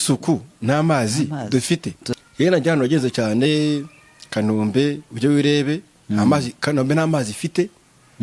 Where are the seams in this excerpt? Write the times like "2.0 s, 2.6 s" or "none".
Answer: 2.1 s